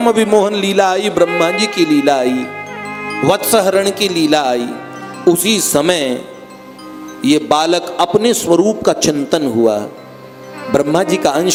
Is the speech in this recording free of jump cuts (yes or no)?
yes